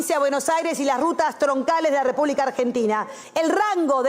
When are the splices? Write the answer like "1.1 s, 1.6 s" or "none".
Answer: 3.2 s